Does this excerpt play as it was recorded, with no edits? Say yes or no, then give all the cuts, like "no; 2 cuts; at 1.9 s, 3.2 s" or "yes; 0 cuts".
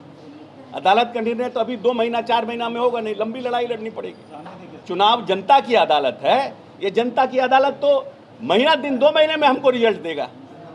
no; 1 cut; at 4.8 s